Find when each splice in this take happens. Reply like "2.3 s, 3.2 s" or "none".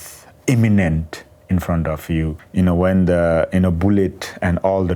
2.4 s